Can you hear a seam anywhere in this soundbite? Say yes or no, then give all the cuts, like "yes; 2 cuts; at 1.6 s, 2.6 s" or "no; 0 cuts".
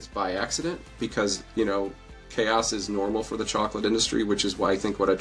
no; 0 cuts